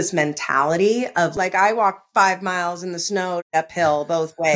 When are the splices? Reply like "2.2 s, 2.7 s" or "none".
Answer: 1.3 s, 3.5 s